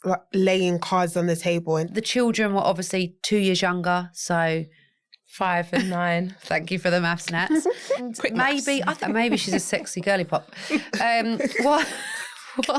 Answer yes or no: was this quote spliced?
yes